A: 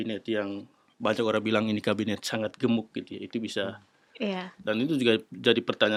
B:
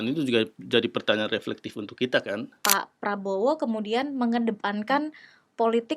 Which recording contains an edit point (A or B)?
B